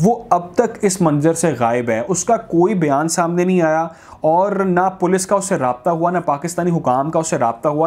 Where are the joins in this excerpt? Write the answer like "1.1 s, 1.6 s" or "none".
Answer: none